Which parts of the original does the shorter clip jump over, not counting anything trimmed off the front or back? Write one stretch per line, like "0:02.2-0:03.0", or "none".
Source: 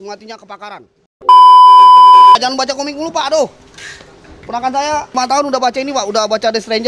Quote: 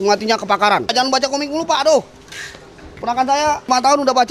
0:01.1-0:02.5